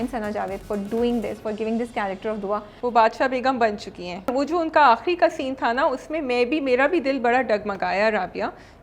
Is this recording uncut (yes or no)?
no